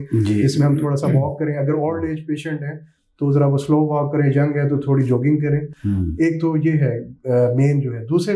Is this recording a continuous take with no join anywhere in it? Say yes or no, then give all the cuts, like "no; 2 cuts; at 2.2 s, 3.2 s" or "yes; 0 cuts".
yes; 0 cuts